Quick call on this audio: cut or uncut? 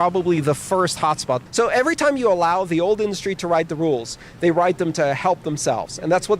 cut